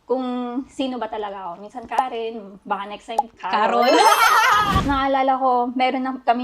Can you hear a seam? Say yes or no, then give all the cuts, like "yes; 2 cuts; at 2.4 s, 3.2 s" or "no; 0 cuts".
yes; 1 cut; at 4.8 s